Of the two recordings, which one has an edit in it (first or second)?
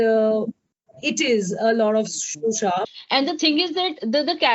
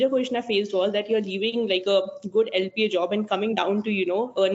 first